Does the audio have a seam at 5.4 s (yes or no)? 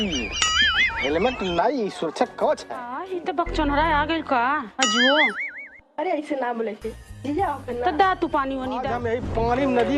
no